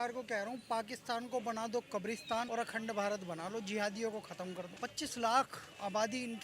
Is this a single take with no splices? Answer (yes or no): no